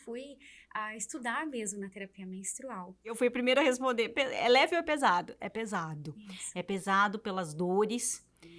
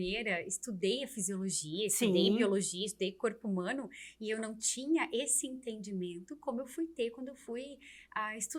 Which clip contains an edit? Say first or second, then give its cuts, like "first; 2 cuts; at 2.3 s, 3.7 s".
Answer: first; 1 cut; at 3.1 s